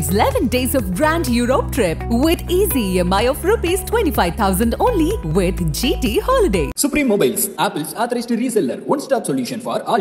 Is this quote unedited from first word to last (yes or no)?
yes